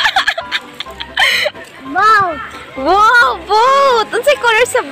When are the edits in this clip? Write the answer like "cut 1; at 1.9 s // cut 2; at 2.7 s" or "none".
cut 1; at 1.7 s